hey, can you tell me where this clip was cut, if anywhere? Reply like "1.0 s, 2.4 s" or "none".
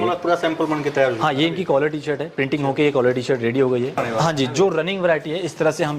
4.0 s